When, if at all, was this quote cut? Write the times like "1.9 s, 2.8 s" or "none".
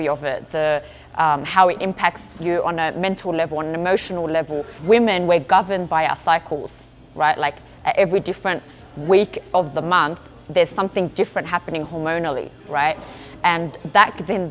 4.8 s